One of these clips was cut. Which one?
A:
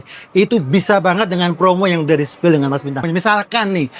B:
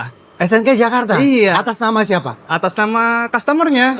A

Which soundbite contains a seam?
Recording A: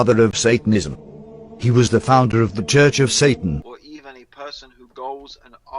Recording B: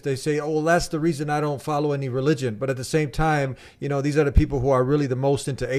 A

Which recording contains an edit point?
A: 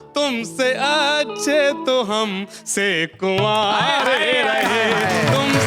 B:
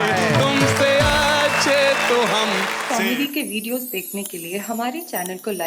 B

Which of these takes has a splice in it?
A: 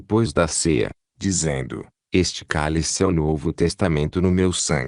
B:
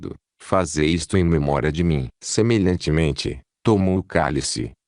B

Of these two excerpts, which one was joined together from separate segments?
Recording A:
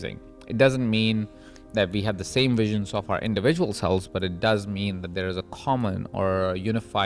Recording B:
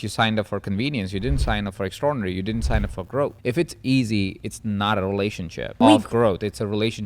B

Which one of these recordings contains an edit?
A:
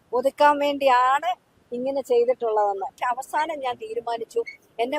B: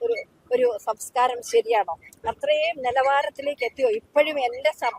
A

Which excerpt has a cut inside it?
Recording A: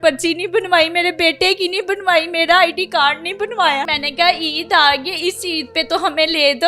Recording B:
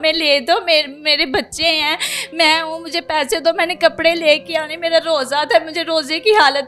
A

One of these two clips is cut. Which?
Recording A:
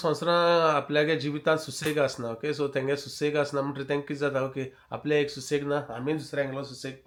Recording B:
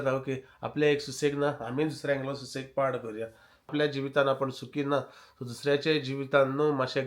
B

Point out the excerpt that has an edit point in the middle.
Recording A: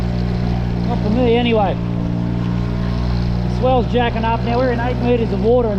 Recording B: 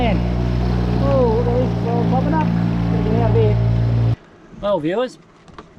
B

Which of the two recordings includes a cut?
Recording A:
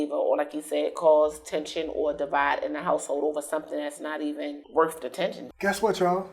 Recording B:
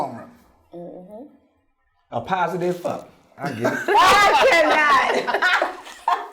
A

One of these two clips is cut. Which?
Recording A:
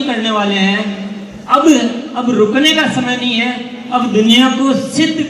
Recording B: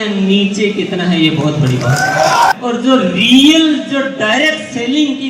B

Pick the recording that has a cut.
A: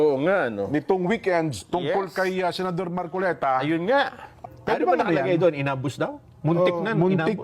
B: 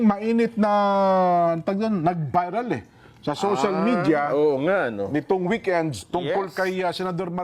A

